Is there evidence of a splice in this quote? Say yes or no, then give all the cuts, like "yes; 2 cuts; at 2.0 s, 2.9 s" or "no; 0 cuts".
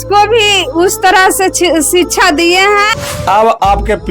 yes; 1 cut; at 2.9 s